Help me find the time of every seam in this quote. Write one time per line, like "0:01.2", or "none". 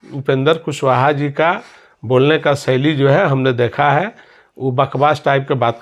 none